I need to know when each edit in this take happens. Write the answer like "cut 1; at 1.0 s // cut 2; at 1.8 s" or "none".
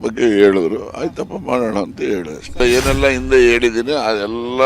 cut 1; at 2.6 s